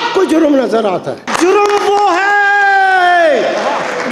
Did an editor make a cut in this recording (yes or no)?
yes